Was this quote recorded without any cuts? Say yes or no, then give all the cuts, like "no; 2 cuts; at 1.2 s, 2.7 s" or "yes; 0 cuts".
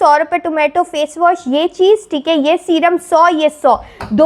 yes; 0 cuts